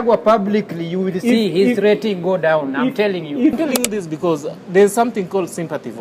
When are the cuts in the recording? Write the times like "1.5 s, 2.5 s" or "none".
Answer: 3.6 s